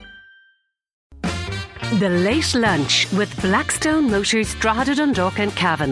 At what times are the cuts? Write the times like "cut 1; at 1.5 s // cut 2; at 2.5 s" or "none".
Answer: cut 1; at 1.0 s